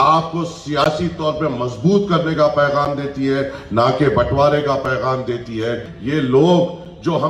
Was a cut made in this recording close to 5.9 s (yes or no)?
yes